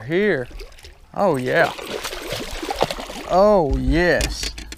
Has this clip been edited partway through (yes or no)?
no